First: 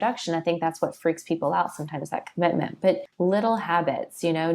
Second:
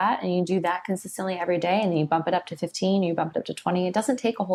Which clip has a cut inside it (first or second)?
first